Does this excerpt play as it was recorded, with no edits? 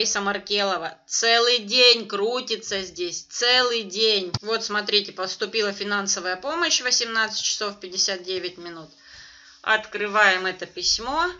no; 1 cut; at 4.4 s

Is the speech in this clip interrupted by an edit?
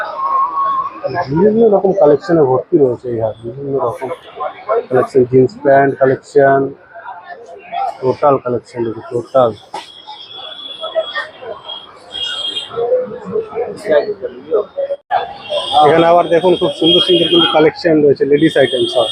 no; 0 cuts

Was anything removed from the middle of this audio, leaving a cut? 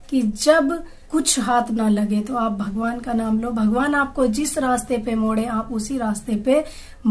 yes; 1 cut; at 0.9 s

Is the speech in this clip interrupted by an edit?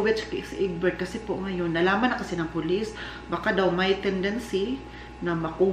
no; 0 cuts

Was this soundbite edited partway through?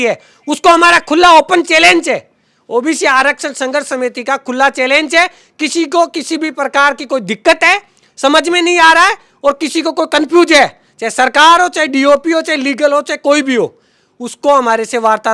no; 0 cuts

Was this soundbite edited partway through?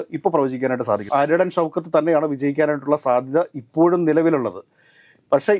yes; 1 cut; at 1.1 s

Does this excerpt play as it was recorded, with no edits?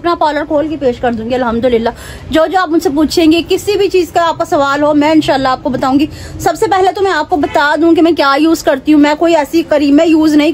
yes; 0 cuts

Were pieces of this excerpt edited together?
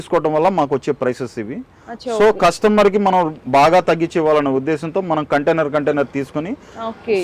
no; 0 cuts

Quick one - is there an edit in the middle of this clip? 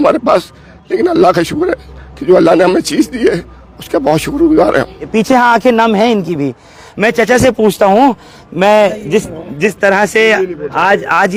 no; 0 cuts

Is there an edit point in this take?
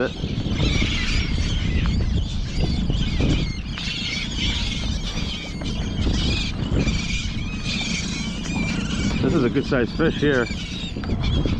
no; 0 cuts

